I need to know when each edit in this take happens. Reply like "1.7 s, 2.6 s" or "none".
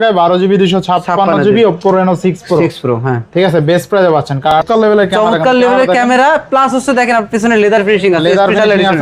4.6 s